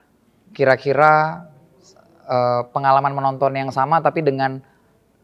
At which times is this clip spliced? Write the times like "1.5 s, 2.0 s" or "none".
none